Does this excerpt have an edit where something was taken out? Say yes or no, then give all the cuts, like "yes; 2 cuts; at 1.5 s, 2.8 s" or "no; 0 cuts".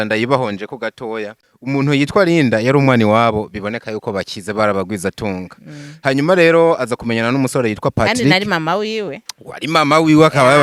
yes; 1 cut; at 1.5 s